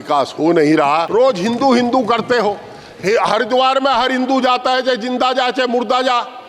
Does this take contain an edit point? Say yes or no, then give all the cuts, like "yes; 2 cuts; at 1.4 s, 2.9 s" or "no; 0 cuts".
yes; 1 cut; at 1.1 s